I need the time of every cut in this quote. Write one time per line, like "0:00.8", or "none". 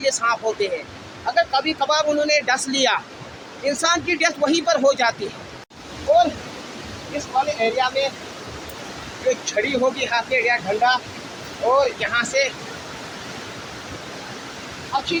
none